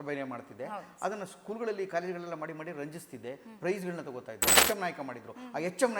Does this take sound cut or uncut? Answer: cut